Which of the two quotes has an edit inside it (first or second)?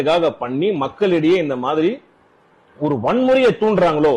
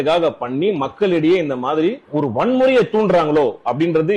second